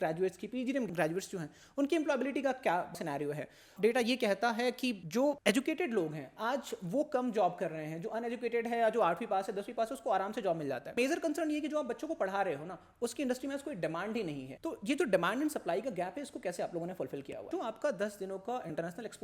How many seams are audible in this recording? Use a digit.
3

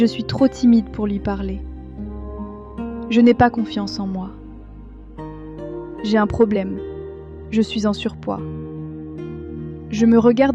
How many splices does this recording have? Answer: 2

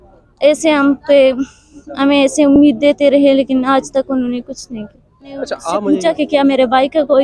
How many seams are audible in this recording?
1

